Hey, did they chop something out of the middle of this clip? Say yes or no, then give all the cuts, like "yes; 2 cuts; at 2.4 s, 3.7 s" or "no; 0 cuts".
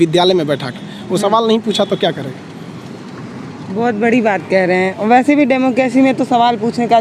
no; 0 cuts